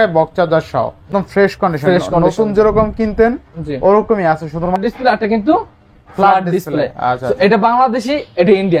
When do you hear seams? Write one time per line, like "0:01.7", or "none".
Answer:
0:01.1
0:04.7